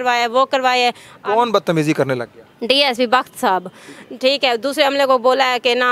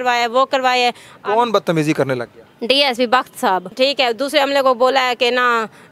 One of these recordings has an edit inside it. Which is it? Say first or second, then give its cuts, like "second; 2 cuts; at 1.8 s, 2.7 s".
second; 1 cut; at 3.7 s